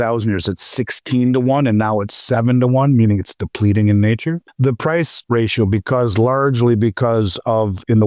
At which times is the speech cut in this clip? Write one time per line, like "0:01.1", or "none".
0:04.5
0:05.2